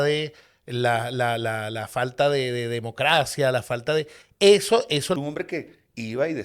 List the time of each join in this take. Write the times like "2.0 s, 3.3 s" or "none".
5.2 s